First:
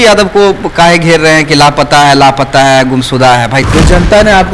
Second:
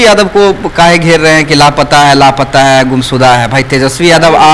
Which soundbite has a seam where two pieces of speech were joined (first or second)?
first